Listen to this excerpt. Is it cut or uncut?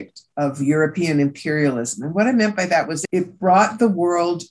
uncut